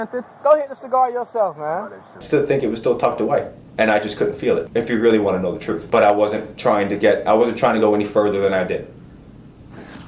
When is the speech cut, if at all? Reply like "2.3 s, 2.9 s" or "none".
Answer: 2.2 s, 4.7 s, 5.7 s